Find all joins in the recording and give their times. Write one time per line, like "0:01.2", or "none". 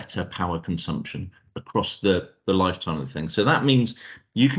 none